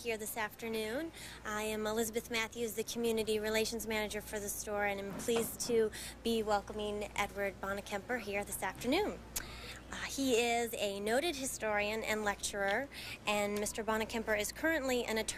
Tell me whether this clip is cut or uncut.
uncut